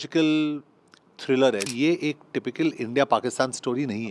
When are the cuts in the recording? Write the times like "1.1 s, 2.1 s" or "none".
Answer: 1.7 s